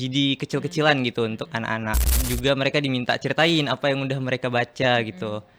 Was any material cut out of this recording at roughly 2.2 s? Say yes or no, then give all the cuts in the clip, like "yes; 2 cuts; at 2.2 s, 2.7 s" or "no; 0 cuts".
yes; 1 cut; at 2.2 s